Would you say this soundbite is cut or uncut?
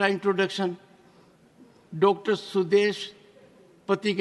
uncut